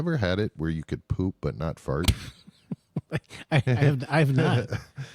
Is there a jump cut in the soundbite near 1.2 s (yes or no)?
no